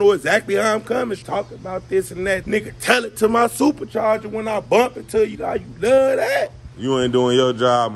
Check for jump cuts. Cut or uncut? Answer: cut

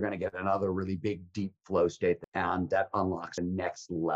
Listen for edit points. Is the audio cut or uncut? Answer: cut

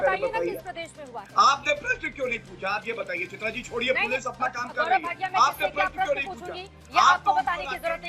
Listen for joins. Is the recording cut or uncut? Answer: uncut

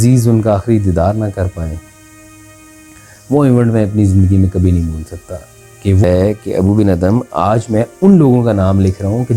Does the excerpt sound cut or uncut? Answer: cut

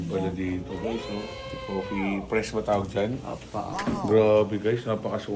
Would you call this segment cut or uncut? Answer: cut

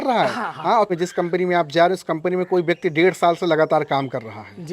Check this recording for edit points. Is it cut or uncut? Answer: cut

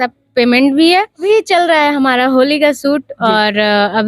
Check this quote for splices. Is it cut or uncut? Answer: cut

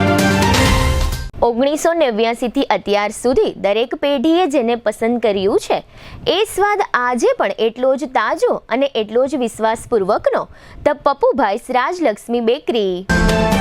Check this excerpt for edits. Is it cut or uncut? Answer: uncut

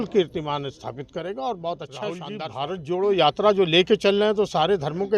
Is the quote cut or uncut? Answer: cut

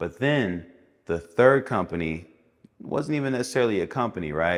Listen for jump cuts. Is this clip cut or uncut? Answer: uncut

